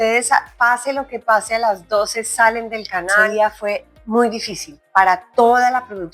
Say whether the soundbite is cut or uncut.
cut